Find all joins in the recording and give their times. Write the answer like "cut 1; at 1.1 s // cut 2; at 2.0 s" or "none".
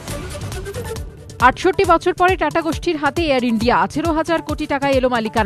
cut 1; at 0.9 s